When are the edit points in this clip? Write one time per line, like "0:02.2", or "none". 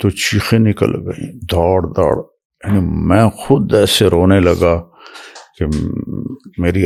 none